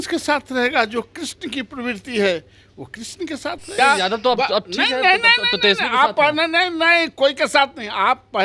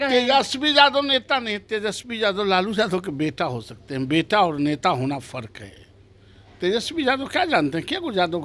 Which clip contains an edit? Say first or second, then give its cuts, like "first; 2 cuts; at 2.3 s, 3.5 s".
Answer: first; 1 cut; at 3.7 s